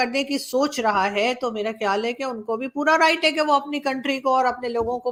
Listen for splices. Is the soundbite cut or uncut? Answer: uncut